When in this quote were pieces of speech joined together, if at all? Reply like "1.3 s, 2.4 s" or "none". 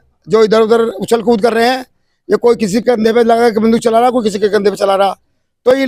none

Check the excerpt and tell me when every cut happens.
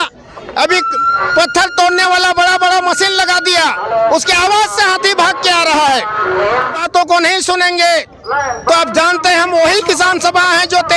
6.9 s

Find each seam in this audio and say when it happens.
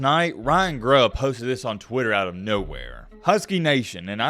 none

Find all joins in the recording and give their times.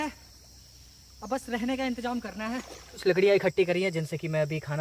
3.0 s

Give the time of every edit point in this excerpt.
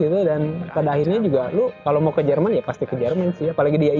1.8 s

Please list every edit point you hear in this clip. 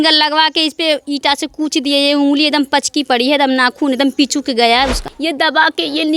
5.1 s

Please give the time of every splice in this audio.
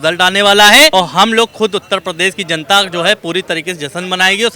0.9 s

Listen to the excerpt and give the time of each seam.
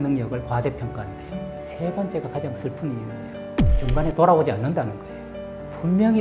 1.6 s

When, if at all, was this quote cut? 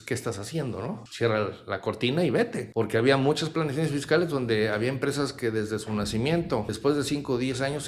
1.1 s, 2.6 s, 6.7 s

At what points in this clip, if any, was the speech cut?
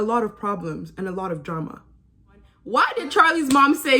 2.5 s

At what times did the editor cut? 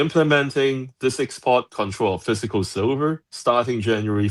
none

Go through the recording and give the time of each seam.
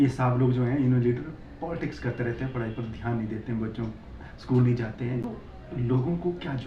5.3 s

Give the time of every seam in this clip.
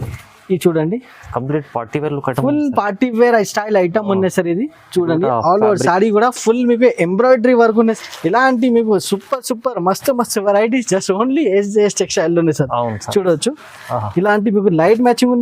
8.0 s

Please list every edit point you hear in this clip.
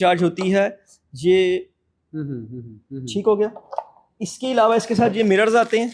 none

